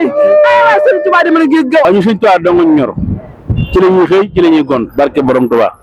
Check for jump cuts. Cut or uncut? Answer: cut